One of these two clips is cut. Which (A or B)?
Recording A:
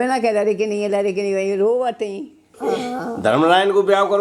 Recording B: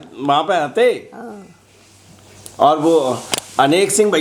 A